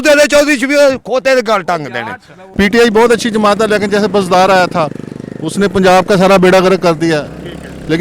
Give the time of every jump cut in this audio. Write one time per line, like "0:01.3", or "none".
0:02.4

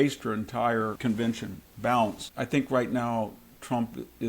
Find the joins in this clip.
0:00.9
0:02.2

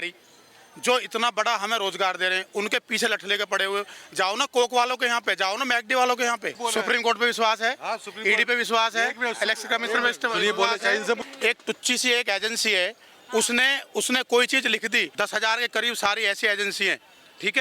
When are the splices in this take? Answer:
0:06.6
0:11.2
0:15.1

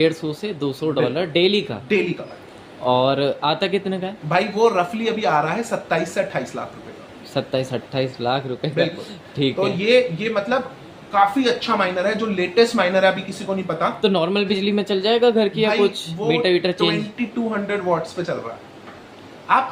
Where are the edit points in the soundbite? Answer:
none

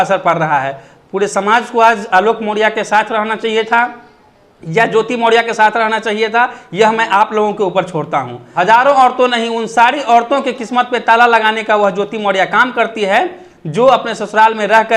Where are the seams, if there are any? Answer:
0:08.4

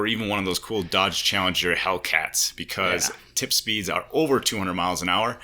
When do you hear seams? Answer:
none

